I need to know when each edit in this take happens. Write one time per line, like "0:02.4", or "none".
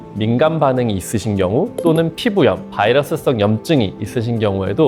none